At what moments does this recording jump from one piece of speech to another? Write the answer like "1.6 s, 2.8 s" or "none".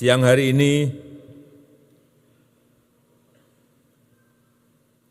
none